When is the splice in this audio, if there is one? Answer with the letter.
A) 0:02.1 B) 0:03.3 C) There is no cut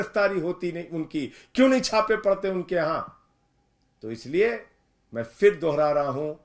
C